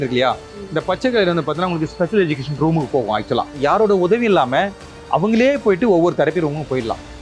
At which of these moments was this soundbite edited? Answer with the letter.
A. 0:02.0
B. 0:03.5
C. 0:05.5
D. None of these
B